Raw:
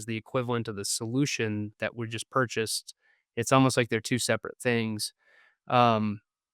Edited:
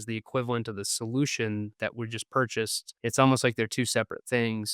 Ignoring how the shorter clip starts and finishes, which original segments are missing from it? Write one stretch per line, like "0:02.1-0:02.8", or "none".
0:02.8-0:03.2

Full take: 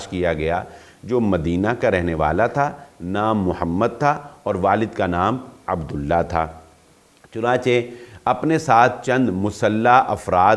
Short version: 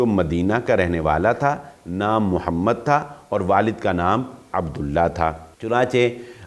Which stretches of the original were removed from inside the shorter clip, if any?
0:06.6-0:07.2

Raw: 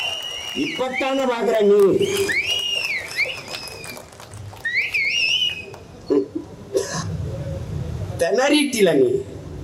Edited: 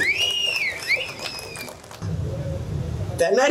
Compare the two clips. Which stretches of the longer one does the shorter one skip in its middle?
0:04.3-0:07.0

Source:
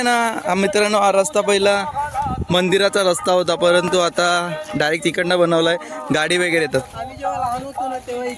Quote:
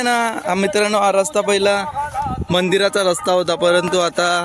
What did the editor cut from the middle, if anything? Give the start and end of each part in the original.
none

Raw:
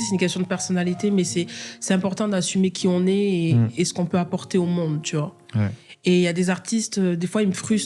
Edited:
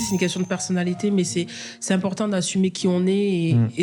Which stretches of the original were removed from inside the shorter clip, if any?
none

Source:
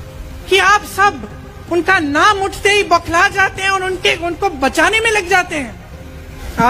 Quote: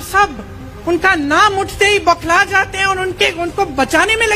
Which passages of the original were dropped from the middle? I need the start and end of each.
none

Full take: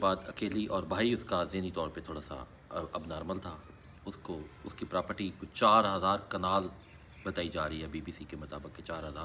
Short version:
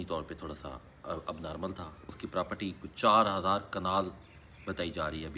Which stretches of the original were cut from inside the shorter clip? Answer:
0:03.7-0:04.6

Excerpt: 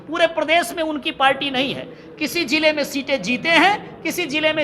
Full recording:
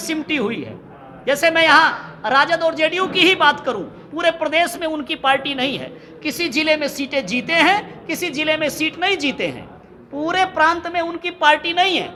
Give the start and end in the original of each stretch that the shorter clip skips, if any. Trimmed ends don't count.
none

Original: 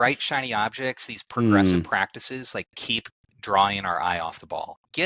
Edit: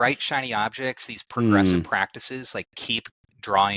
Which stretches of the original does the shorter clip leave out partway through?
none

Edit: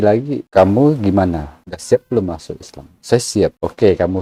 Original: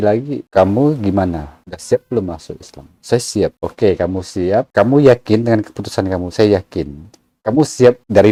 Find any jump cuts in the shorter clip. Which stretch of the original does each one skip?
none

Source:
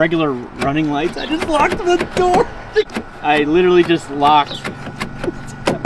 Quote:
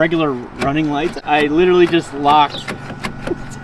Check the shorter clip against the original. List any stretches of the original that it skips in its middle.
0:01.2-0:03.1

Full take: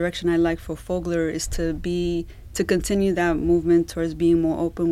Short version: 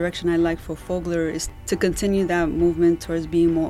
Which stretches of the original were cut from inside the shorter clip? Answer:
0:01.5-0:02.4

